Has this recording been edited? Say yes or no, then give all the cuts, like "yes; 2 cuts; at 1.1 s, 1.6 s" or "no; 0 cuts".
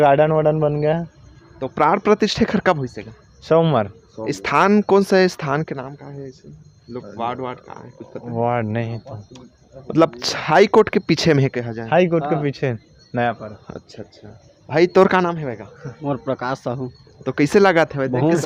no; 0 cuts